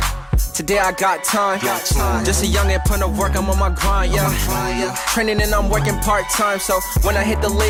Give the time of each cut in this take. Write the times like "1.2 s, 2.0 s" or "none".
none